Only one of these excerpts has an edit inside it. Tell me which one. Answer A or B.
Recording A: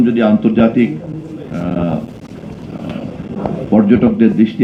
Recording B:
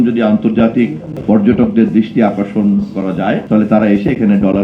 B